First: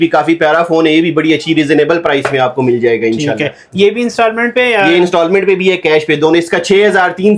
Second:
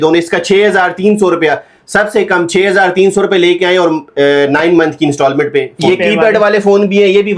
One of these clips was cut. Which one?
second; 1 cut; at 5.7 s

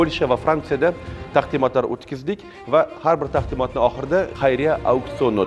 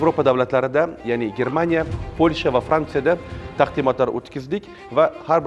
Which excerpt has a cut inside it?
first; 1 cut; at 4.3 s

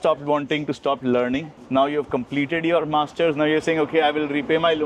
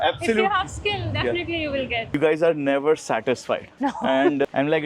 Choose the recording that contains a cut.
second; 1 cut; at 2.1 s

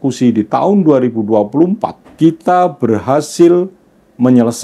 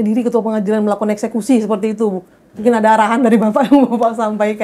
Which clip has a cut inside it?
first; 1 cut; at 2.0 s

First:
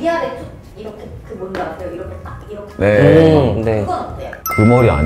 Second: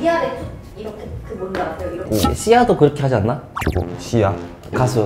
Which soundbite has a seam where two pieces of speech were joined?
second; 1 cut; at 2.0 s

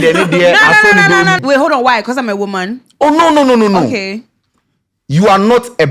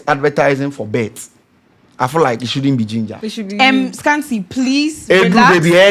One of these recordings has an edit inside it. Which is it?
first; 1 cut; at 1.4 s

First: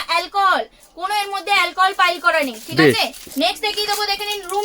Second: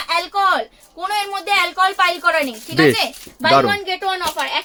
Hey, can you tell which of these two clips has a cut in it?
first; 1 cut; at 3.2 s

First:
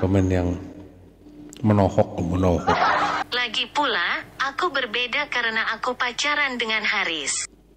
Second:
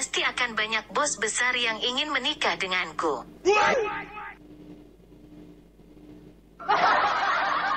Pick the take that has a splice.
first; 1 cut; at 3.2 s

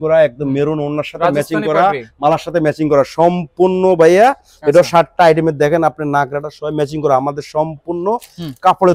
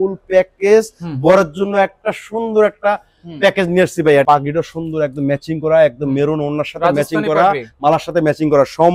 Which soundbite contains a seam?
second; 1 cut; at 4.2 s

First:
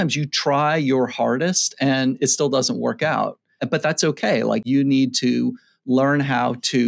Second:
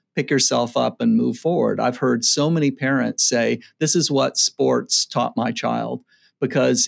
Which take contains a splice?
first; 2 cuts; at 3.6 s, 4.6 s

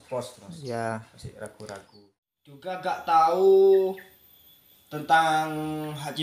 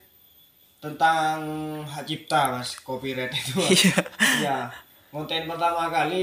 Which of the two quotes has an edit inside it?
first; 1 cut; at 1.9 s

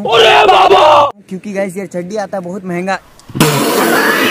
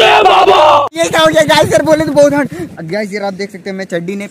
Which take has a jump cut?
second; 1 cut; at 2.6 s

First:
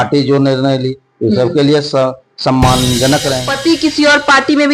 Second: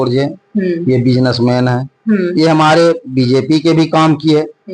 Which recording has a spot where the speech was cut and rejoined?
first; 1 cut; at 3.5 s

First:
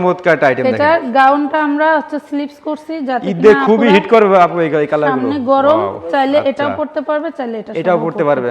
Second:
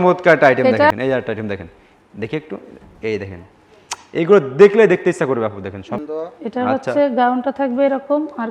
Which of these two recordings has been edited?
second; 2 cuts; at 0.9 s, 6.0 s

